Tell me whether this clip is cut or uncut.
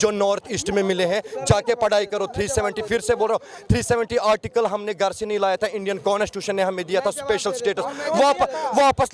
uncut